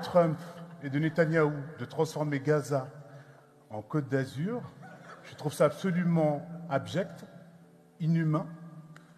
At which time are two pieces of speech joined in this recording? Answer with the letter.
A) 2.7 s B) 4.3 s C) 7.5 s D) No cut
D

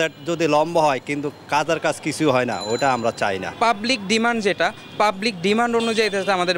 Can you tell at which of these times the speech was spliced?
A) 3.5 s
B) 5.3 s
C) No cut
A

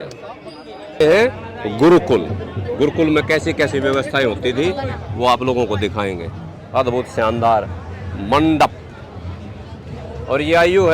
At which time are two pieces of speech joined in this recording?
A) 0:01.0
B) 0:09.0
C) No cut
A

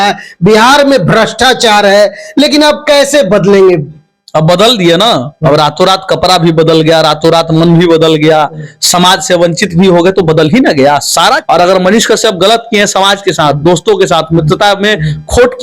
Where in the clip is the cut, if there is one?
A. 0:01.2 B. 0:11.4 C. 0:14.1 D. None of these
B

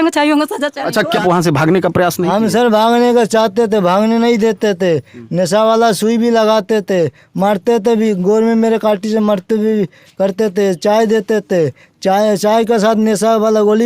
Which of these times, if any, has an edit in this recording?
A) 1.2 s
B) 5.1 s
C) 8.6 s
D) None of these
A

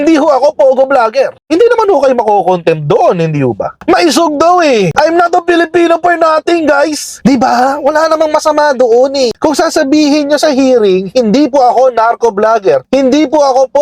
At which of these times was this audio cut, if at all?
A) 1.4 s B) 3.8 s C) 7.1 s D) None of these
B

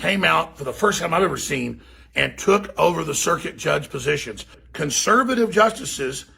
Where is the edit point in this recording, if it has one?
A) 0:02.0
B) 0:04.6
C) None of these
B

